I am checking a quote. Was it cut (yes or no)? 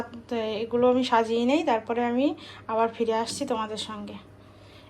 no